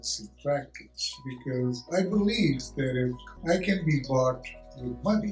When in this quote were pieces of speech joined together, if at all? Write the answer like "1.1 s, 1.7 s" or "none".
3.3 s